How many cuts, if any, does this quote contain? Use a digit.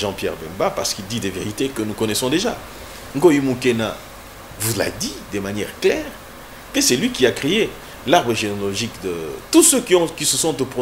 0